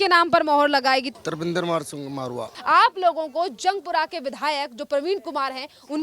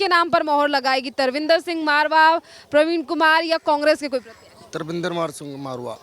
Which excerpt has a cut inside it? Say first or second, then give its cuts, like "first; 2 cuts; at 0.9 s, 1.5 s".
first; 2 cuts; at 1.1 s, 2.5 s